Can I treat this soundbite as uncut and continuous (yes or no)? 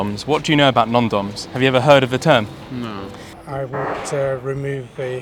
no